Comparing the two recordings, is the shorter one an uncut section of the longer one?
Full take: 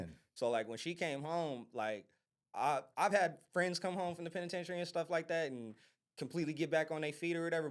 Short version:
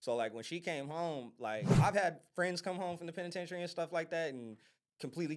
no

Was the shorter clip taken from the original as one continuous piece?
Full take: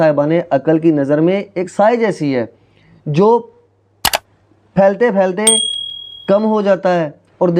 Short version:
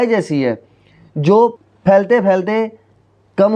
no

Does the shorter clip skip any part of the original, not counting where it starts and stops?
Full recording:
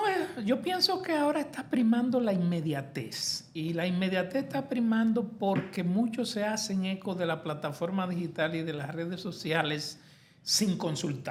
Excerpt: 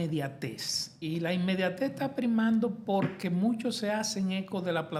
no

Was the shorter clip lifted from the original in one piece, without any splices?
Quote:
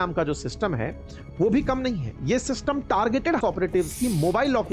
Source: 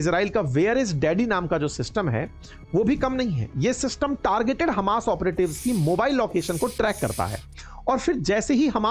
no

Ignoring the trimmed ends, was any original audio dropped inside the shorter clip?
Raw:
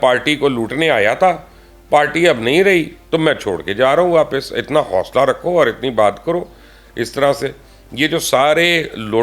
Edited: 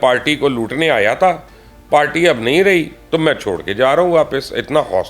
no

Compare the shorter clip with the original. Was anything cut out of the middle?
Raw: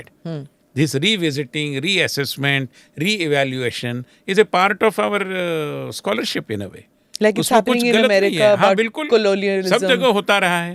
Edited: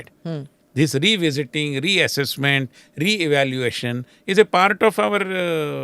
no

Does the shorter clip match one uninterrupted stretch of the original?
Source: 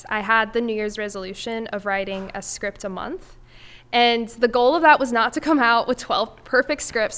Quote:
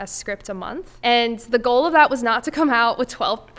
no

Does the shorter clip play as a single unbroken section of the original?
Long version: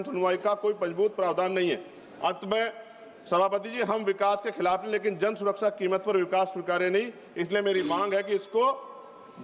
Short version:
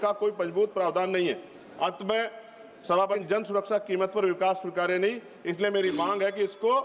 no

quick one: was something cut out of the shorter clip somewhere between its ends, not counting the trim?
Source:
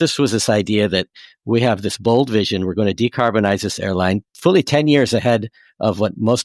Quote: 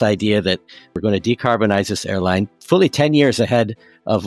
yes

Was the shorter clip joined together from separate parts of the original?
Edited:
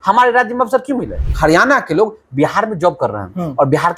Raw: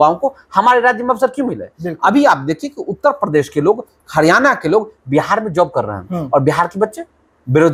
yes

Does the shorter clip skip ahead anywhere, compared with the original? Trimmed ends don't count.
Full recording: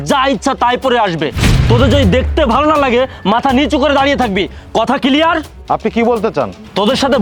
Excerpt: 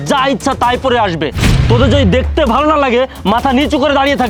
no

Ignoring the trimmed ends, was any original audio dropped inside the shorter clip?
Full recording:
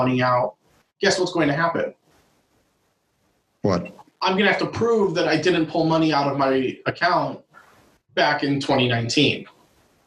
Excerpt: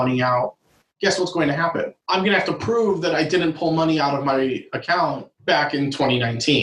yes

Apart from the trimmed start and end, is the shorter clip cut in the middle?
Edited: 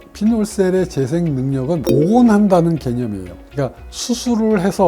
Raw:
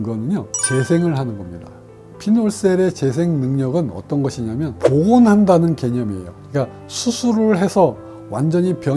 yes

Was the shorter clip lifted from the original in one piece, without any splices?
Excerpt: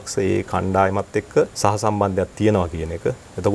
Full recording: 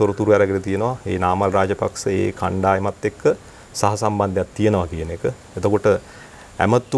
no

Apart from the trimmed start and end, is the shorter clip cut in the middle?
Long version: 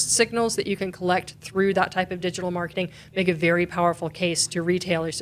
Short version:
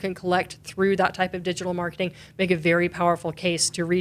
no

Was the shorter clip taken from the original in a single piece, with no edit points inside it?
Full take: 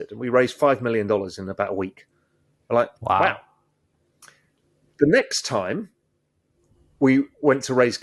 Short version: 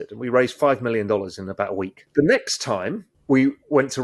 no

